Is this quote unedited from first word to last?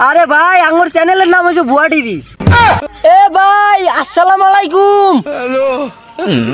no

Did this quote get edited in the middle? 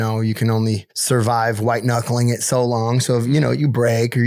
yes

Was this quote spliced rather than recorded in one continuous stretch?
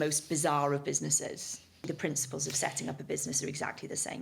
yes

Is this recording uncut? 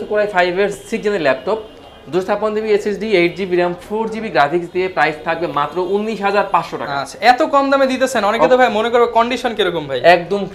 yes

